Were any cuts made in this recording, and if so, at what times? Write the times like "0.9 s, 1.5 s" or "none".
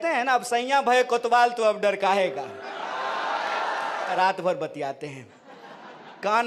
4.1 s